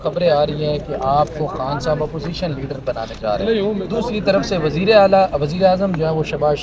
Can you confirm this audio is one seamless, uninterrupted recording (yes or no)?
yes